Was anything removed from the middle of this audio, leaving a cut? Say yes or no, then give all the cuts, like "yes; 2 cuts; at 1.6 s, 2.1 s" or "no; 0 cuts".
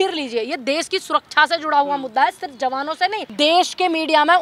yes; 1 cut; at 3.2 s